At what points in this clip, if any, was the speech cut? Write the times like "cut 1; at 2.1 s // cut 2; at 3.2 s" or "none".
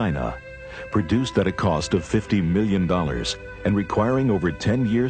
cut 1; at 2.3 s